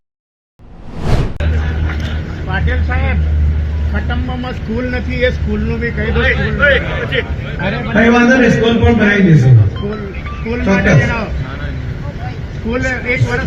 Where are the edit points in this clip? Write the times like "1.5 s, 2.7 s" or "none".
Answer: 1.0 s